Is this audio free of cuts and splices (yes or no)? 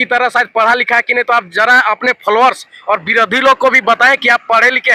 yes